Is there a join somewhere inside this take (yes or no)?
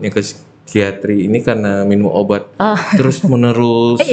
no